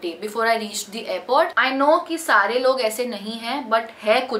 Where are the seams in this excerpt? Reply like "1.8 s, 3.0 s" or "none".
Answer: 1.6 s